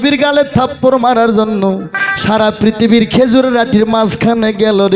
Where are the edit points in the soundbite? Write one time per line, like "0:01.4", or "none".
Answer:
none